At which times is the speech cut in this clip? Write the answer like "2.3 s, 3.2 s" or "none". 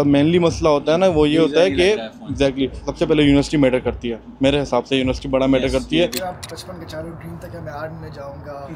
6.3 s